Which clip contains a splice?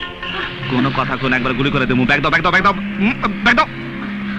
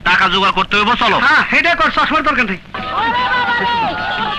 second; 1 cut; at 2.8 s

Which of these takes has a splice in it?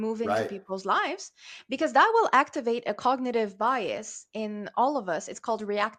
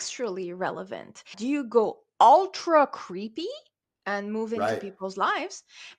second; 1 cut; at 1.3 s

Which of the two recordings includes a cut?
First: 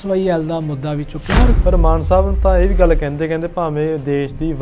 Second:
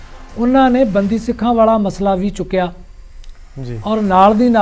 first; 1 cut; at 1.6 s

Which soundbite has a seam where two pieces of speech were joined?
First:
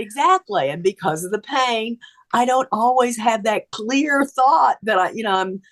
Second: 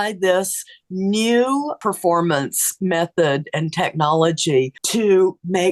second; 2 cuts; at 1.7 s, 4.8 s

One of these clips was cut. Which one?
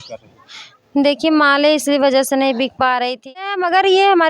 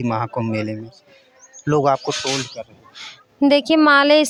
first; 1 cut; at 3.4 s

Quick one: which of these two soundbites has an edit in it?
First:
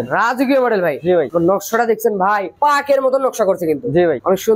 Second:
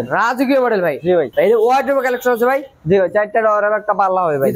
second; 1 cut; at 1.3 s

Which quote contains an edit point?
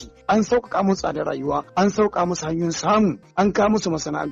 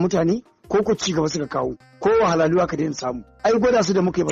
first; 2 cuts; at 1.7 s, 3.2 s

